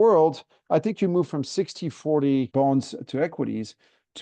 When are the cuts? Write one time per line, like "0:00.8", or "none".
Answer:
0:02.5